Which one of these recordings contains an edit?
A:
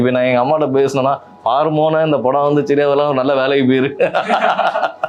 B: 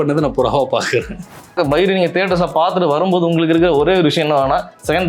B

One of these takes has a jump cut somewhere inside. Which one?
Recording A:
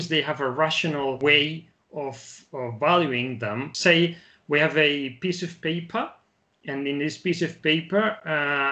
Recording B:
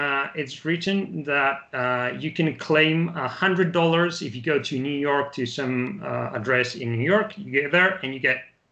A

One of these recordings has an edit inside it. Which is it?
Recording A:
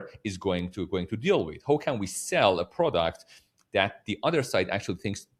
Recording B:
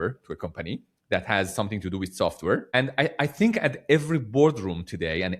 B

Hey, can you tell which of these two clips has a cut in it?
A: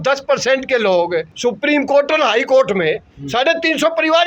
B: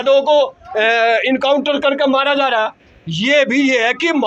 A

